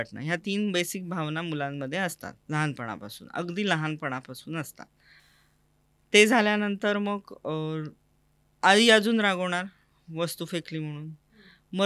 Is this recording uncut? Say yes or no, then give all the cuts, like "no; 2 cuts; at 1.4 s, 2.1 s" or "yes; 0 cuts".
yes; 0 cuts